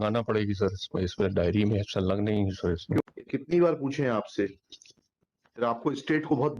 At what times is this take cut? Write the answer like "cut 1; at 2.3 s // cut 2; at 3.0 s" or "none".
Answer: cut 1; at 3.0 s